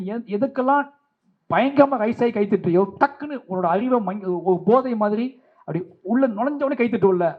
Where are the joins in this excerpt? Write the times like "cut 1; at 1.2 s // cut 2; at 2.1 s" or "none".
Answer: none